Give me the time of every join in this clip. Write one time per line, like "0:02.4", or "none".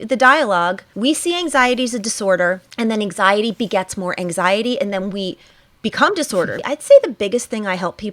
0:00.9
0:02.7
0:06.6